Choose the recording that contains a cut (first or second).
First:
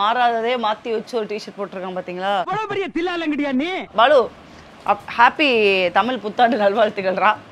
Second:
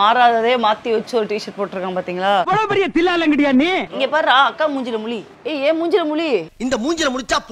second